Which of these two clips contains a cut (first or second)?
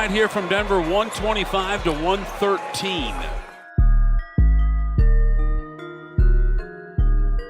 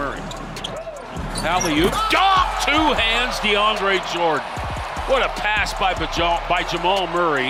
first